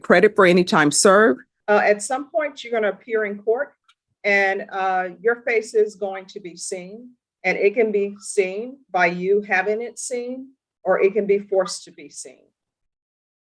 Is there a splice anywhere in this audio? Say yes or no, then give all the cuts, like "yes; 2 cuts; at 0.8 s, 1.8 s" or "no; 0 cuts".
yes; 1 cut; at 1.5 s